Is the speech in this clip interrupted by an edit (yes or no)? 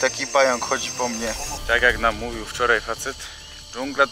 yes